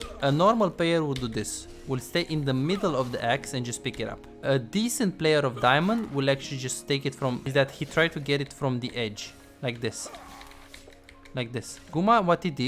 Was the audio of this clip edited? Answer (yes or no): yes